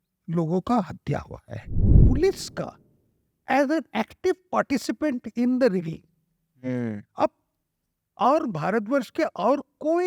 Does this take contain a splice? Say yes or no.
yes